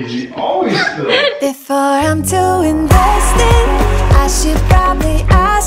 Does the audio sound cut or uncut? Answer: cut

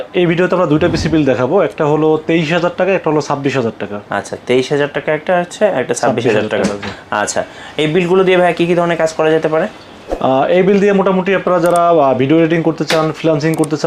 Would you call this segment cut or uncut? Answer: uncut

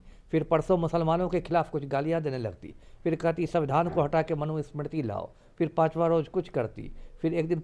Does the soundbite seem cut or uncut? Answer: uncut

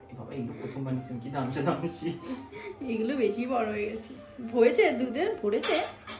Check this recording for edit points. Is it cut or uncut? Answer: uncut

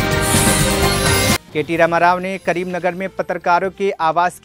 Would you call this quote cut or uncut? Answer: uncut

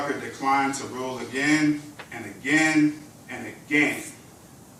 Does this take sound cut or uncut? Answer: uncut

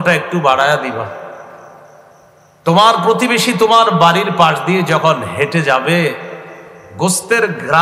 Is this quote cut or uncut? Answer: uncut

